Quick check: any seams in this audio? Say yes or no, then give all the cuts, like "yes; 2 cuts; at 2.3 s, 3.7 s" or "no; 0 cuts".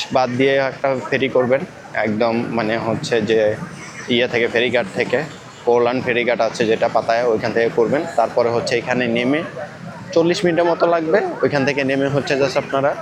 no; 0 cuts